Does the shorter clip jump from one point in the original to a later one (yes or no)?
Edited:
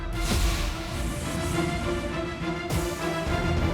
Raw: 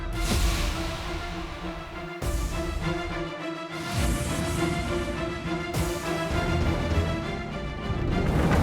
yes